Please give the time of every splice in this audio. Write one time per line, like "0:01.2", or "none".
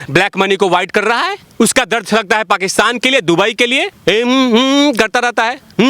0:01.4
0:03.9